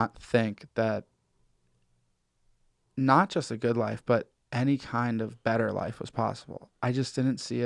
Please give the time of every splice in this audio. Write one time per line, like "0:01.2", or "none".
none